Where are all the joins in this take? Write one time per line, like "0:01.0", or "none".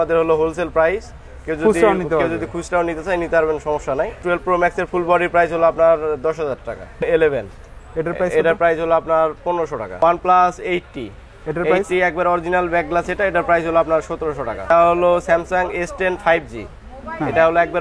0:04.2
0:07.0
0:10.0
0:14.7